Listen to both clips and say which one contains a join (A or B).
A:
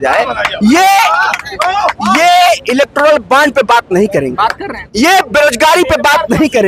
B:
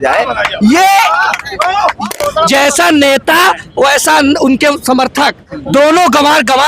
B